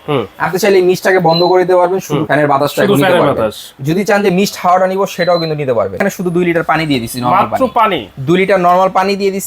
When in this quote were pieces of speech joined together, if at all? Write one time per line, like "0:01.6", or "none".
0:02.2
0:06.0

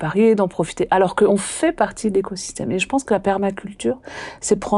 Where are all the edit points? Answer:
0:01.3

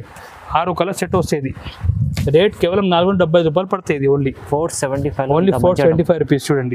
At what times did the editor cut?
none

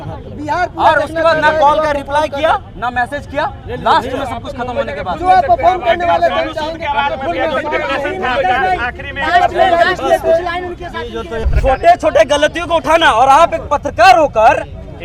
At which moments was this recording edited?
0:11.4

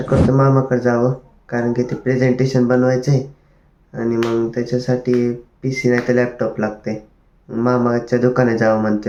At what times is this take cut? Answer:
none

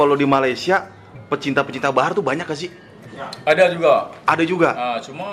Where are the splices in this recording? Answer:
none

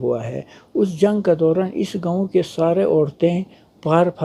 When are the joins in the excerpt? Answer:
none

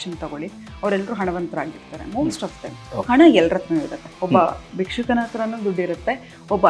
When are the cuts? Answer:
0:02.8

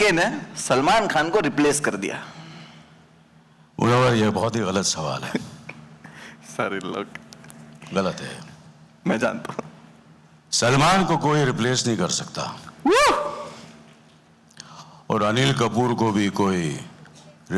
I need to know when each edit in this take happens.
none

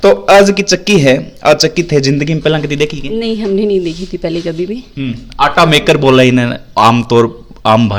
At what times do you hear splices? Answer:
none

